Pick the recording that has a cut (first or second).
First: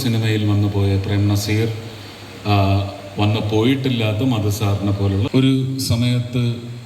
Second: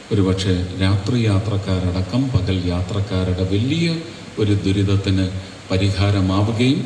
first